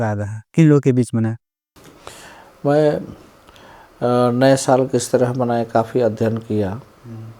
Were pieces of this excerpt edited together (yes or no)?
no